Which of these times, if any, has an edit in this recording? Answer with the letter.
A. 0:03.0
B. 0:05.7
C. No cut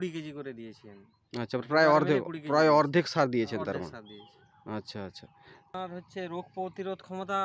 B